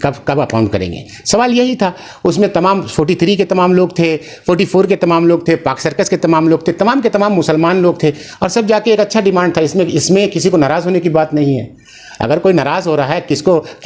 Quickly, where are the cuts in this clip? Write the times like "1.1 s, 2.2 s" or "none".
none